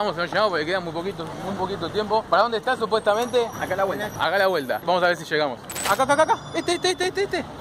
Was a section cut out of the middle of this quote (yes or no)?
yes